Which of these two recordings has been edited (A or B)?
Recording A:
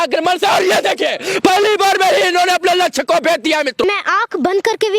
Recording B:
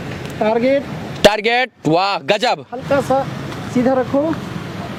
A